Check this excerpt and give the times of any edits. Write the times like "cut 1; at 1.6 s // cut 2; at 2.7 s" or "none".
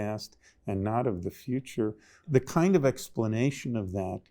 cut 1; at 2.2 s